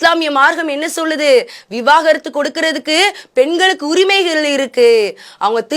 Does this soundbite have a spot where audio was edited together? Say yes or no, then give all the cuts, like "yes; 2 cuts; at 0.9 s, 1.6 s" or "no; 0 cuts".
no; 0 cuts